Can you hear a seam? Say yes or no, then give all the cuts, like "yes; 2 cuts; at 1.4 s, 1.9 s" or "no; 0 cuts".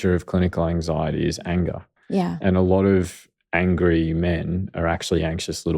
no; 0 cuts